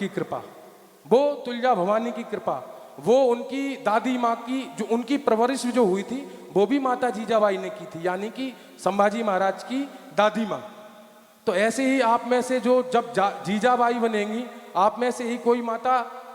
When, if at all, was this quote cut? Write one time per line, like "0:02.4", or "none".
none